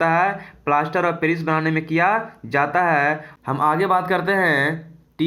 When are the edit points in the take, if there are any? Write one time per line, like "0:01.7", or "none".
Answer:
0:03.3